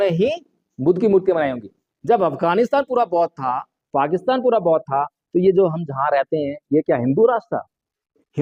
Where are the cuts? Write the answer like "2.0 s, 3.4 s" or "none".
none